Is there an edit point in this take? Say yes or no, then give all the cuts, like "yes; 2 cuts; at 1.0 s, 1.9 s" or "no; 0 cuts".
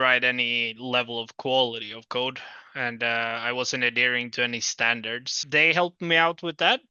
yes; 1 cut; at 5.3 s